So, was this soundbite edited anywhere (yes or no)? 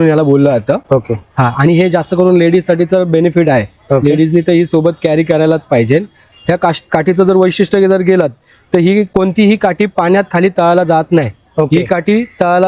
no